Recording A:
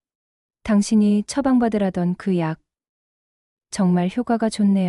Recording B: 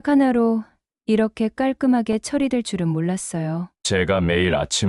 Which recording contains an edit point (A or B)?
B